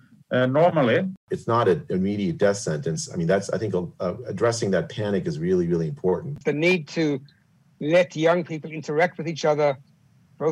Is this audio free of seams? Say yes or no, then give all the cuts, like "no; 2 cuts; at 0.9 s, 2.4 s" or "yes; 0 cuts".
no; 2 cuts; at 1.2 s, 6.4 s